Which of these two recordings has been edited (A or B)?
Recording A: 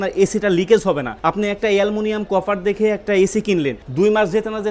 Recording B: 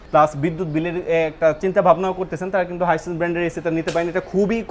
A